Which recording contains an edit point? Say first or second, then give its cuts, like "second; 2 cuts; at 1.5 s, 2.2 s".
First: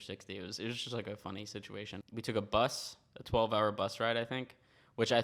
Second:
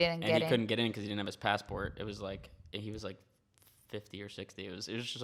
first; 1 cut; at 2.0 s